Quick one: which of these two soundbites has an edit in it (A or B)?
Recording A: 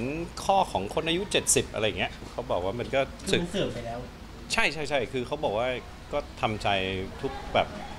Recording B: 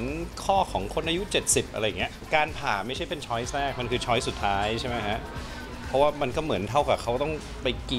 B